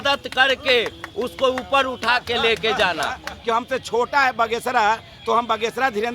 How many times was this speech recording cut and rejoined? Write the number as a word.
one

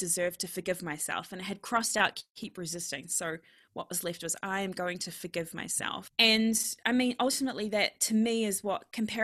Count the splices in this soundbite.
one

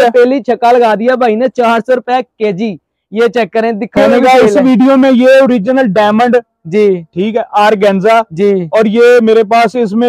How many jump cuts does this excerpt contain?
one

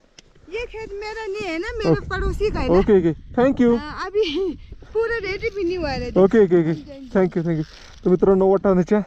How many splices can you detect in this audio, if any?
zero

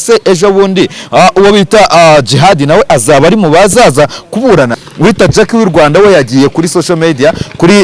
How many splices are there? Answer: one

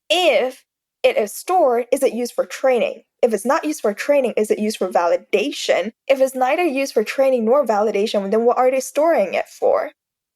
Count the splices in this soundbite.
one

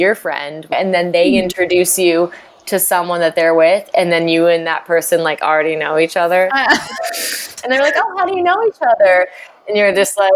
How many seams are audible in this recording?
two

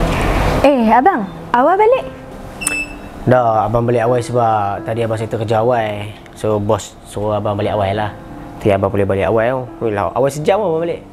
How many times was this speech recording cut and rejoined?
zero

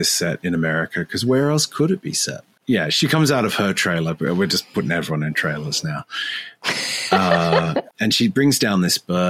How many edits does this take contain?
two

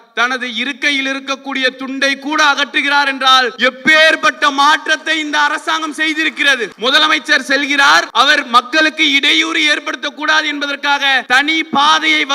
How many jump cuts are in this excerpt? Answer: four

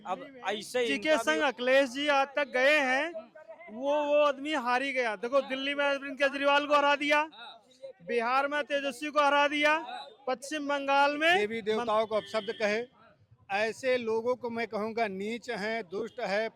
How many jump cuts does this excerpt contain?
two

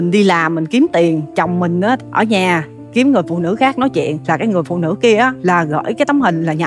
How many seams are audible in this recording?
three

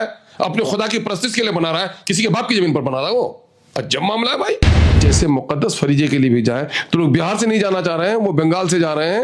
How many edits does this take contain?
one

